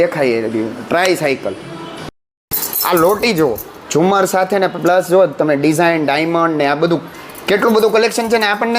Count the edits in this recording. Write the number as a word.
one